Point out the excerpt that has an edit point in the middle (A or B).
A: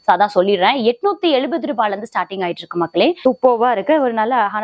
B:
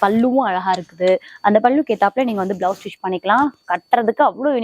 A